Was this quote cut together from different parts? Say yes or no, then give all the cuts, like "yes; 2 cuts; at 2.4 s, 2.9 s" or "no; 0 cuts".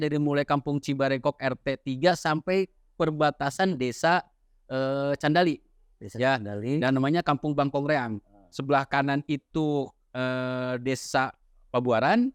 no; 0 cuts